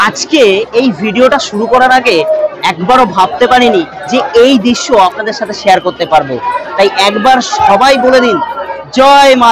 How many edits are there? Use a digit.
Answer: 0